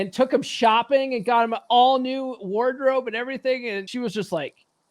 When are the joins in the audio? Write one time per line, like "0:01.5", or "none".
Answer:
0:03.9